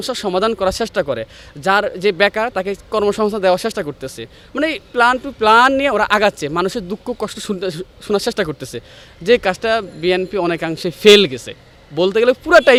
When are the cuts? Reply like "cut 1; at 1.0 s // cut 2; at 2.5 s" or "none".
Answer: none